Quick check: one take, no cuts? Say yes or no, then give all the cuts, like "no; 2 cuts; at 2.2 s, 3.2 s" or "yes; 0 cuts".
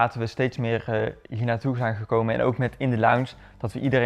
yes; 0 cuts